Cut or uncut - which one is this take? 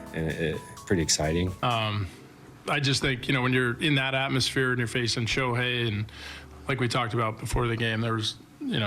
cut